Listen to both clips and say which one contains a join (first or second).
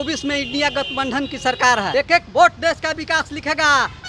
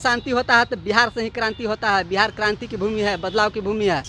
first